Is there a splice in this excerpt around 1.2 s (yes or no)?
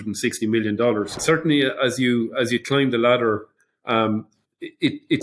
yes